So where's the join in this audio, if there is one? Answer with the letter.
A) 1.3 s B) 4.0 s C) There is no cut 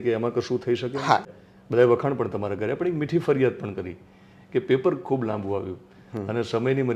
A